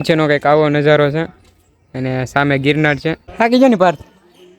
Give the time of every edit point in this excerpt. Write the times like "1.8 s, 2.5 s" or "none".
3.2 s